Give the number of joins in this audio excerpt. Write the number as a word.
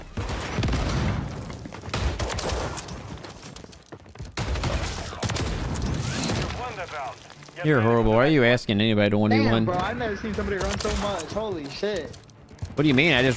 zero